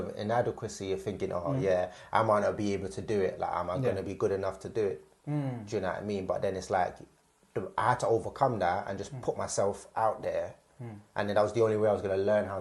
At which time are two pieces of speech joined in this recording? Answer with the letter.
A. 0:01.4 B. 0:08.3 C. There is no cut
C